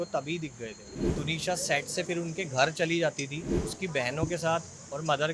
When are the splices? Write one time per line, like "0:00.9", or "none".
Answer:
0:01.0
0:03.6